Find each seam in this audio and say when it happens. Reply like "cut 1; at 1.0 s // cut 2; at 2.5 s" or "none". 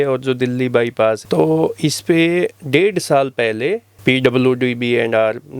cut 1; at 1.2 s